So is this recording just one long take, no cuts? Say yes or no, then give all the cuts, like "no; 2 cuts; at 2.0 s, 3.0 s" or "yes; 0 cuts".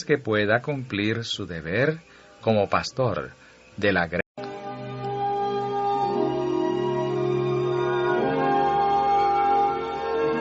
yes; 0 cuts